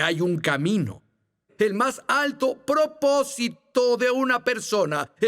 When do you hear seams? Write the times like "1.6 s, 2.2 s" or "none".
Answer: 1.5 s